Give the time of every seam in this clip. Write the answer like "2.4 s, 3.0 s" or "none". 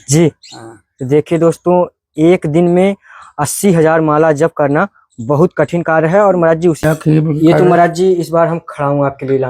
6.8 s